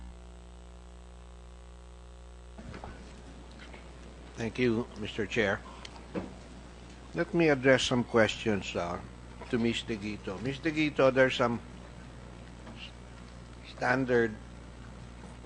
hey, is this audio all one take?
no; 1 cut; at 1.0 s

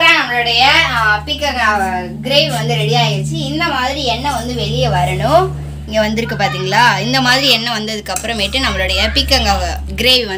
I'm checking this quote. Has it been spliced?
no; 0 cuts

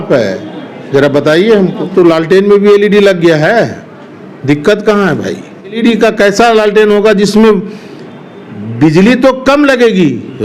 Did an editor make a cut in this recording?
yes; 2 cuts; at 1.9 s, 5.8 s

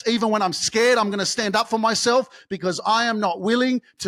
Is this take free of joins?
yes; 0 cuts

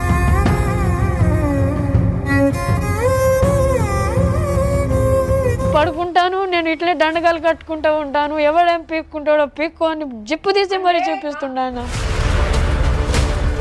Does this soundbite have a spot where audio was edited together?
yes; 2 cuts; at 5.7 s, 12.0 s

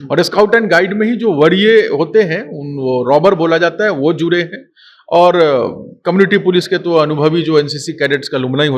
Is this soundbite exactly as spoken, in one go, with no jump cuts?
yes; 0 cuts

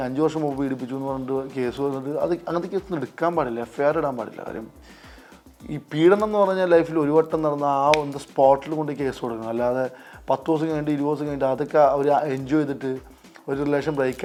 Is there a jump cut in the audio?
no; 0 cuts

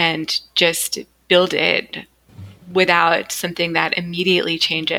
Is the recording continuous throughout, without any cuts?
yes; 0 cuts

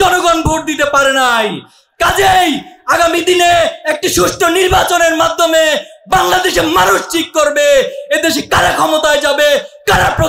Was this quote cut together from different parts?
no; 0 cuts

